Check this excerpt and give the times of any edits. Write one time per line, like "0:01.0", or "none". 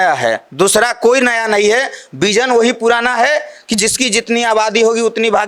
none